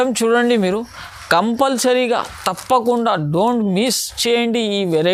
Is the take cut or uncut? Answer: uncut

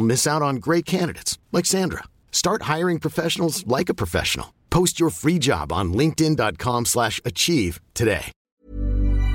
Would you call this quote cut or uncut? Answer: cut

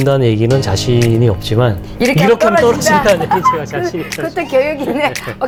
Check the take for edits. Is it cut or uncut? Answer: uncut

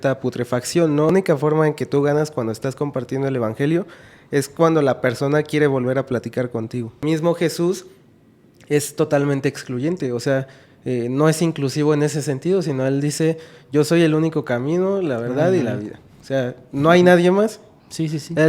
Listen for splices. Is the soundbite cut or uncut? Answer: cut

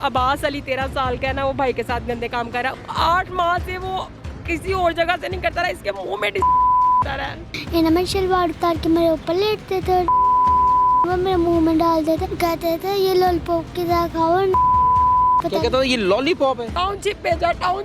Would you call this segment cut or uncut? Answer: cut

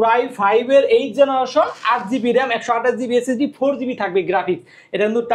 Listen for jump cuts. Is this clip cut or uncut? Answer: uncut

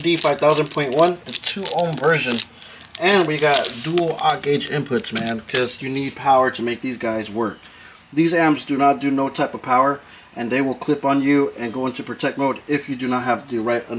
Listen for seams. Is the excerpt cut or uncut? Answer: uncut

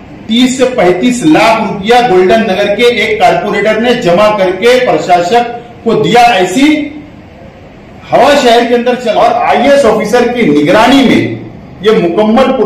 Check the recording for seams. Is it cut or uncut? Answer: cut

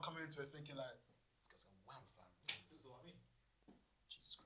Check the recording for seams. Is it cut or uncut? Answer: uncut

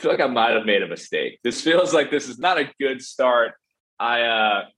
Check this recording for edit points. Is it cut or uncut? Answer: cut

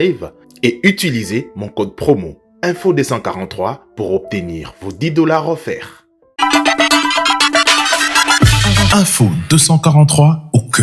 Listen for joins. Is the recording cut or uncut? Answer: uncut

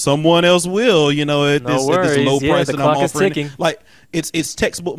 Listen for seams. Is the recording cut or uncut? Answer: uncut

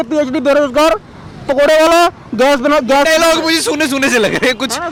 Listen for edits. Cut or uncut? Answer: uncut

